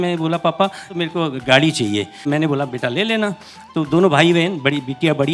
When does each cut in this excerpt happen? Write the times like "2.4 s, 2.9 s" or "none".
0.9 s, 2.3 s, 3.6 s